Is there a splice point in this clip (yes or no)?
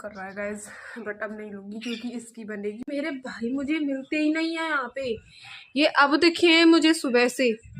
yes